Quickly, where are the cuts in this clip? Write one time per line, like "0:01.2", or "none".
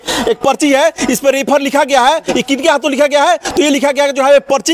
none